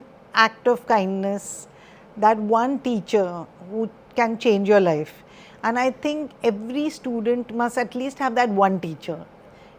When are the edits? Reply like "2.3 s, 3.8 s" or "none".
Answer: none